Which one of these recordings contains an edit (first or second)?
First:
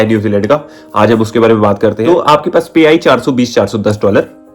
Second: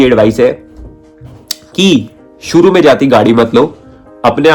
first